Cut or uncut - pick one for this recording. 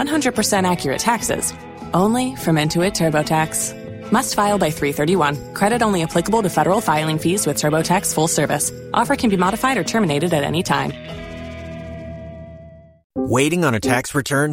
uncut